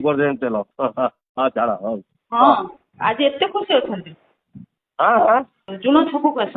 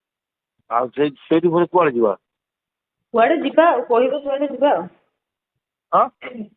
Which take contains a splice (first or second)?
first